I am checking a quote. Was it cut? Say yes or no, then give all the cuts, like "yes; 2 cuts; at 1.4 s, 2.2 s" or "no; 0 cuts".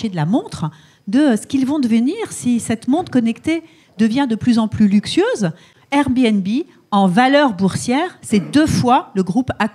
yes; 1 cut; at 5.7 s